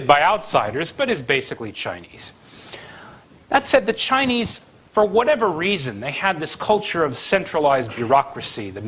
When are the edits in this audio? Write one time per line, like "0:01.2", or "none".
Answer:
0:03.8